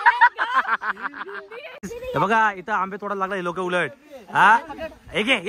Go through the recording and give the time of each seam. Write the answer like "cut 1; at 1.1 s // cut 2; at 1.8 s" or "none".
cut 1; at 1.7 s